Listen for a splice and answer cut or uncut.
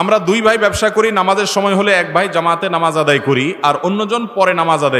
uncut